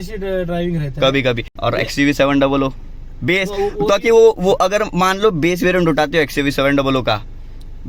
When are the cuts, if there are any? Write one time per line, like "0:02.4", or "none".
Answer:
0:01.5